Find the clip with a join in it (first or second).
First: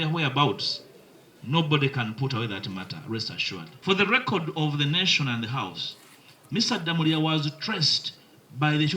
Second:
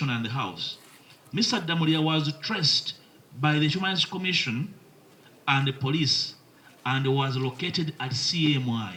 first